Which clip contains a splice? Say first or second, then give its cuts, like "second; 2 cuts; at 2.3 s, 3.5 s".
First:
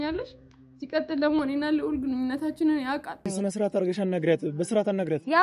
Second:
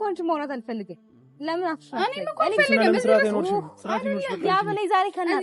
first; 1 cut; at 3.3 s